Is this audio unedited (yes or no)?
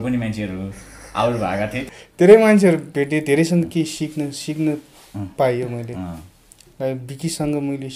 no